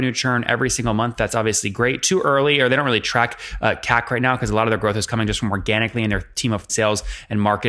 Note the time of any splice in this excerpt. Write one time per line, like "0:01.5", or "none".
0:06.7